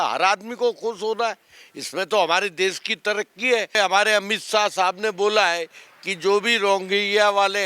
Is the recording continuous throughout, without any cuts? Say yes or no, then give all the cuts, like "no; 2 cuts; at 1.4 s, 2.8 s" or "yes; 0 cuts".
no; 1 cut; at 3.7 s